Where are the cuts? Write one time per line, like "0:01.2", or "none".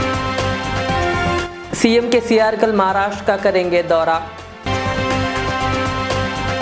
none

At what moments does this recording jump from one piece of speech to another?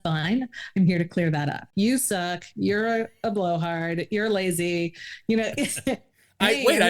0:01.7

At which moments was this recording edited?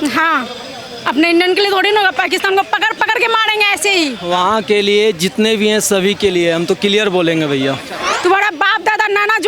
0:08.1

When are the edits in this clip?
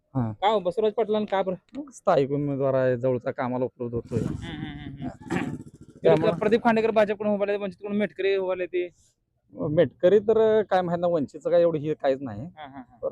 none

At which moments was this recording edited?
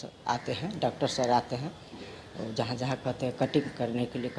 none

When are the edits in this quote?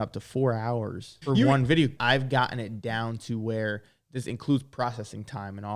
0:01.1
0:02.0

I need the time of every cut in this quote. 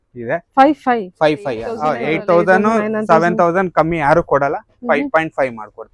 0:01.8

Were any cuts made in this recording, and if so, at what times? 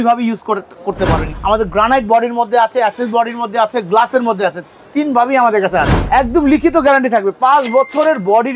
0:01.3
0:06.0

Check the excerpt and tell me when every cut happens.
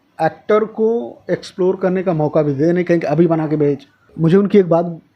0:04.0

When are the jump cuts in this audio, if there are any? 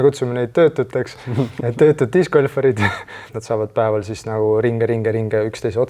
0:03.4

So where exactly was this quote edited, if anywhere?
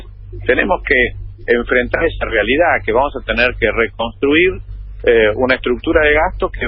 0:04.8

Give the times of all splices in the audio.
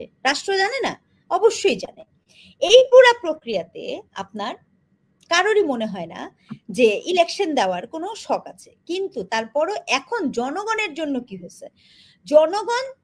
none

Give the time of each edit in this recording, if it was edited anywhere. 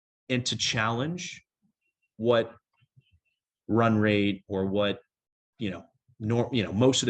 none

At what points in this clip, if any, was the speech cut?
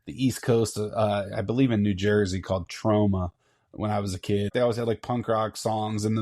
0:04.5

